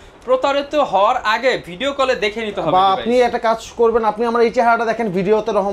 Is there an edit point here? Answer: no; 0 cuts

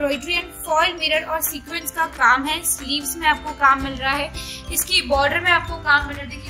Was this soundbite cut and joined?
no; 0 cuts

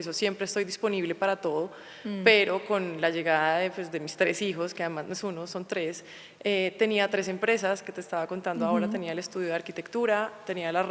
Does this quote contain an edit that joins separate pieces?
no; 0 cuts

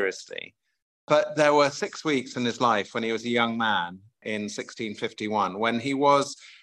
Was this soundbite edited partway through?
yes; 1 cut; at 4.2 s

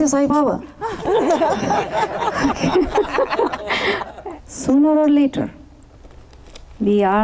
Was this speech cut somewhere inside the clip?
yes; 1 cut; at 4.1 s

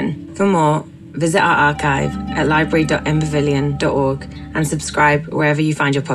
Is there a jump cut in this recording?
no; 0 cuts

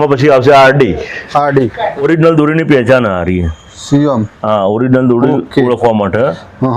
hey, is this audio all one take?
no; 1 cut; at 2.0 s

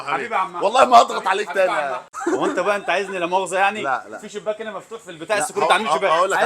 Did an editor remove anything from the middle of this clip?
yes; 1 cut; at 2.1 s

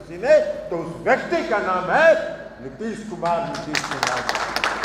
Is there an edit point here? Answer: no; 0 cuts

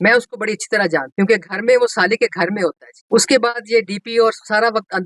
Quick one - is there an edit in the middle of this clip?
yes; 1 cut; at 3.0 s

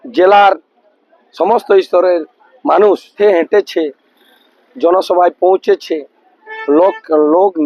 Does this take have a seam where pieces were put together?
yes; 1 cut; at 3.1 s

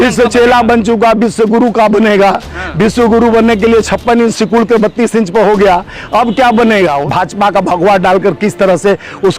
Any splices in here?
yes; 1 cut; at 7.0 s

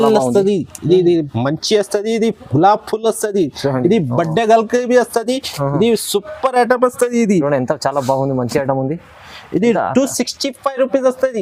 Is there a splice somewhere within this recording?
no; 0 cuts

